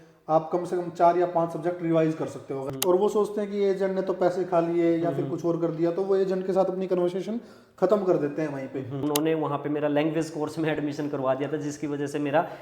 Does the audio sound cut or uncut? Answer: cut